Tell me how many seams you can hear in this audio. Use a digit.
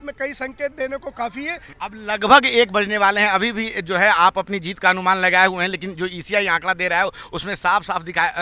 0